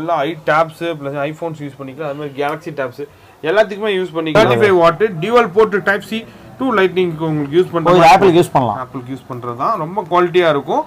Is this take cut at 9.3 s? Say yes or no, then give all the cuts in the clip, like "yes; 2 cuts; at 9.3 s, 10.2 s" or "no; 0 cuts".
no; 1 cut; at 4.3 s